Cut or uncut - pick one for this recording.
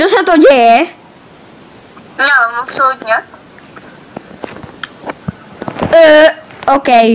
uncut